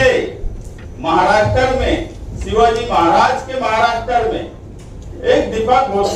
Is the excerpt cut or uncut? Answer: uncut